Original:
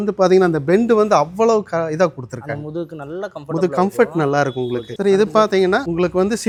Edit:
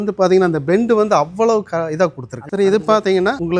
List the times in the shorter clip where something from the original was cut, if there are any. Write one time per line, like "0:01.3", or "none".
0:02.4